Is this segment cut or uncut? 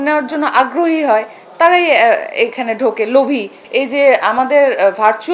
cut